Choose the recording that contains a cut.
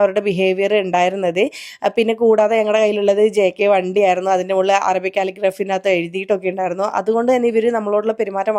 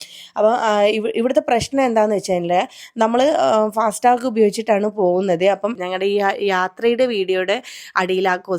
second; 1 cut; at 5.9 s

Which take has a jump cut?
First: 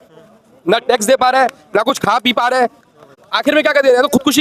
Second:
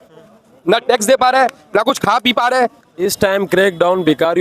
second; 1 cut; at 3.0 s

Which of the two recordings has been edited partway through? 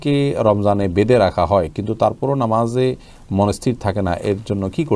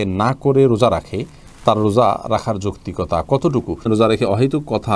second; 1 cut; at 3.8 s

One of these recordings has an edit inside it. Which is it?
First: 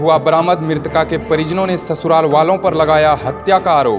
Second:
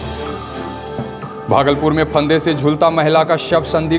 second; 1 cut; at 1.3 s

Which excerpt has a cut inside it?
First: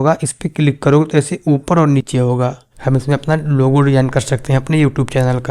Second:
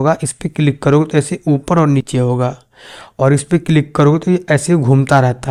first; 1 cut; at 2.7 s

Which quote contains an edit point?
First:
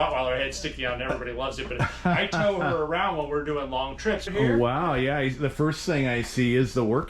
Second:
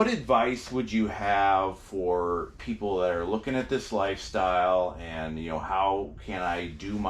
first; 1 cut; at 4.3 s

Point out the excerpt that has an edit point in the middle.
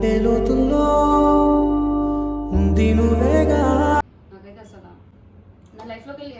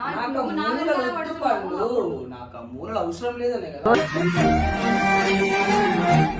first; 1 cut; at 4.0 s

